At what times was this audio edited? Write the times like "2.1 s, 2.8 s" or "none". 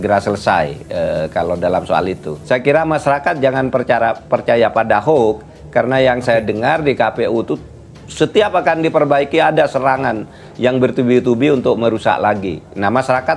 2.3 s